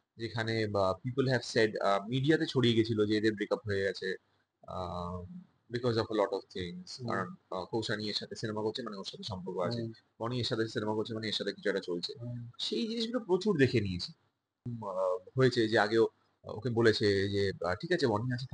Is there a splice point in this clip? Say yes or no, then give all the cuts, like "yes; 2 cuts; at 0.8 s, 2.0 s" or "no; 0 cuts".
yes; 1 cut; at 14.6 s